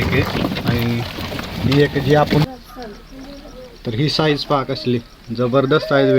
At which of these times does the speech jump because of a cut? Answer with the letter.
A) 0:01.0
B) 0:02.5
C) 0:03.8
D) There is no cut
B